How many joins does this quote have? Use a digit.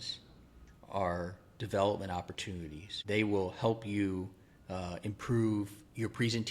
1